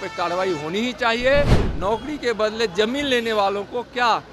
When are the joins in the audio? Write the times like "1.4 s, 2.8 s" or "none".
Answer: 1.6 s